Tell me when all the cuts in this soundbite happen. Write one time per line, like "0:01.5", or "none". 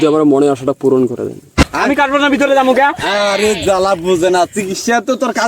0:01.6